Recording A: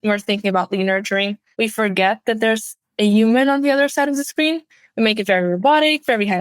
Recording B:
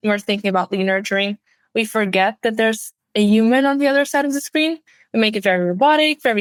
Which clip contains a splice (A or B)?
A